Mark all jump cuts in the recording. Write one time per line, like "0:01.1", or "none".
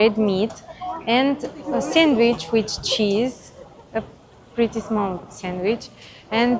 none